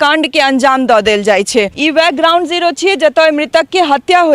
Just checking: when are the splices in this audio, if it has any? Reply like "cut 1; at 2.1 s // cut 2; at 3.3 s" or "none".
cut 1; at 1.8 s